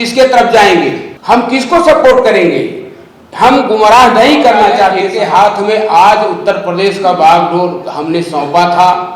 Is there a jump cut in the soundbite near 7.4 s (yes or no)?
no